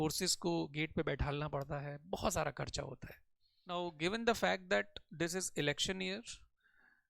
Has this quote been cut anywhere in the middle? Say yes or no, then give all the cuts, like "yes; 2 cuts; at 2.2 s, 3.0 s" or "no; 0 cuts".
yes; 1 cut; at 3.8 s